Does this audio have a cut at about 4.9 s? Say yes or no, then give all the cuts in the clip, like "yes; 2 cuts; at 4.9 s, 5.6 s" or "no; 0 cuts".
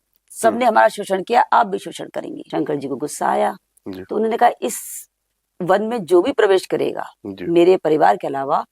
no; 1 cut; at 2.4 s